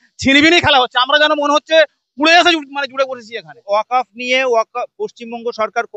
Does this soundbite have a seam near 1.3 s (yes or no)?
no